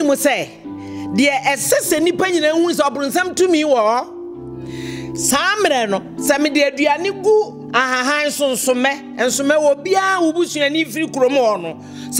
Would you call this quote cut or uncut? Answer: uncut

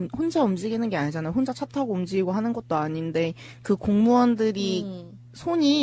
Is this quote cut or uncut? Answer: uncut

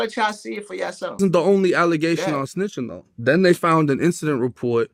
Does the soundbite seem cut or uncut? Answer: uncut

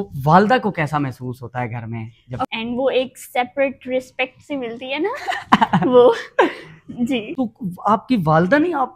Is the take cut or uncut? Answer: cut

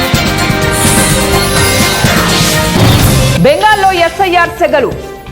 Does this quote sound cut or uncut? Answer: cut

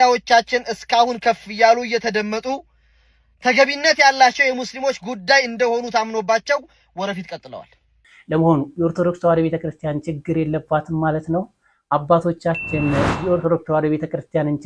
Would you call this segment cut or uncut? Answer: cut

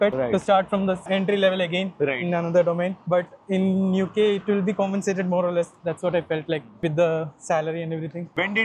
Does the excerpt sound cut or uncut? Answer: uncut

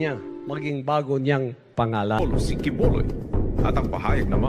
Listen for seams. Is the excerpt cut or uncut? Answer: cut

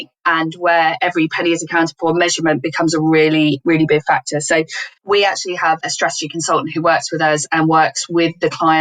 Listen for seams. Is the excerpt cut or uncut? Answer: cut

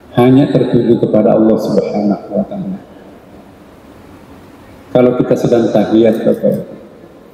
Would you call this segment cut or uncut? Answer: uncut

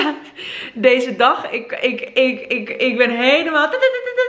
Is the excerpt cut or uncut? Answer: uncut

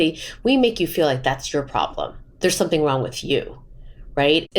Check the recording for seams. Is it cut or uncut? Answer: cut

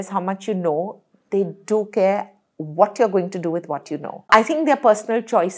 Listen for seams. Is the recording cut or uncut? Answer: cut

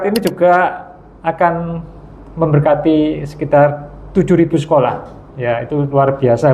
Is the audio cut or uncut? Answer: uncut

